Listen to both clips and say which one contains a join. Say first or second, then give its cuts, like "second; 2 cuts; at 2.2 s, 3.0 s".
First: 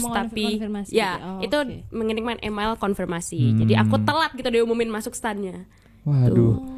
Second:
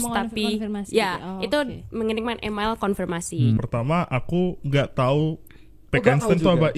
second; 1 cut; at 3.6 s